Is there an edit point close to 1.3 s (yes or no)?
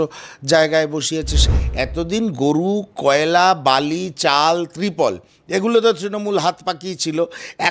yes